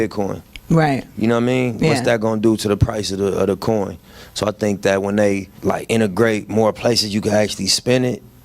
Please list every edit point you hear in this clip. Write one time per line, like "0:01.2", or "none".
0:05.5